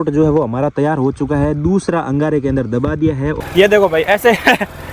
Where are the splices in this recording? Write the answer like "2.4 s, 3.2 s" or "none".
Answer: 3.4 s